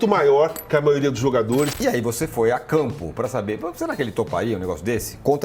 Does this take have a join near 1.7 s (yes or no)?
yes